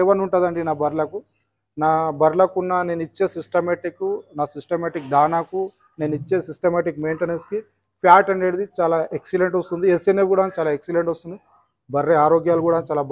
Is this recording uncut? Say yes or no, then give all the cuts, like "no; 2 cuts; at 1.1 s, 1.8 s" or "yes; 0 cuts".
yes; 0 cuts